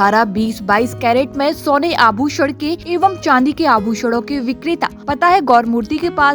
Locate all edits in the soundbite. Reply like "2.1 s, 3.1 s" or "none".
2.8 s, 5.0 s